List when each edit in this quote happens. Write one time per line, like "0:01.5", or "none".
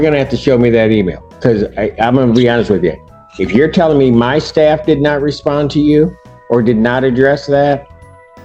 none